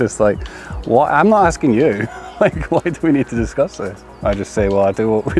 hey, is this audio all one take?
no; 1 cut; at 4.0 s

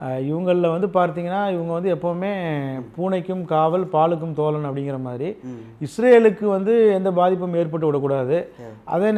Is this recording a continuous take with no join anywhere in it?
yes; 0 cuts

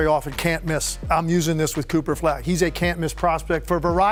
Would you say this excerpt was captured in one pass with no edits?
yes; 0 cuts

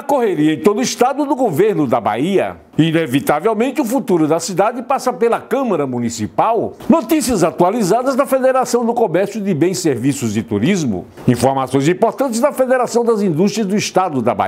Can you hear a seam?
yes; 3 cuts; at 2.6 s, 6.7 s, 11.1 s

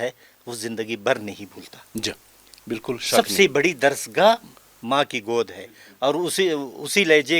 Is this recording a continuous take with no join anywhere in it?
yes; 0 cuts

